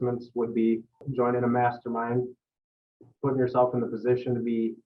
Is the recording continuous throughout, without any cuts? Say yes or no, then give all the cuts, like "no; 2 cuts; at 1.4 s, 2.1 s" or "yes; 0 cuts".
no; 1 cut; at 1.1 s